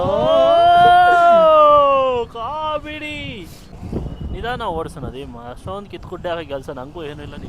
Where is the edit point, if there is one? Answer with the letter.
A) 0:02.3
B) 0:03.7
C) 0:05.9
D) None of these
B